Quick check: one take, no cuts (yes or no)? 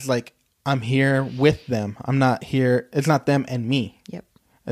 yes